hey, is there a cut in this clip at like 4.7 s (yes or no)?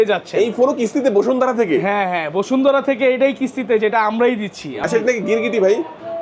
yes